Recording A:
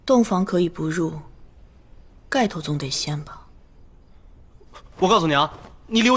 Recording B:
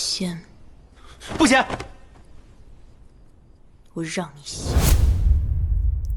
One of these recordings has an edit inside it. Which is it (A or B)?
B